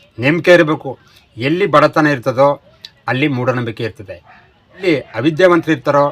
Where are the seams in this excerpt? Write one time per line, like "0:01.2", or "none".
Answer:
0:04.8